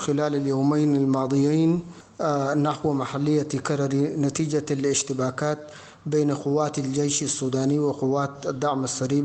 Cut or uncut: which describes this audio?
uncut